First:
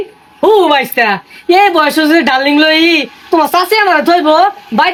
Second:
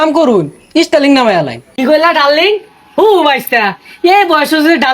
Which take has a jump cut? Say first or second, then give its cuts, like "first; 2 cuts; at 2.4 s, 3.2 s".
second; 1 cut; at 1.6 s